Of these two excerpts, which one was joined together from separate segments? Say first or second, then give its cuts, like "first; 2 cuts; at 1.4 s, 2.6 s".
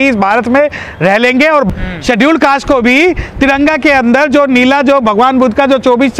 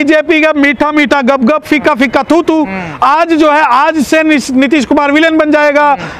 first; 1 cut; at 1.7 s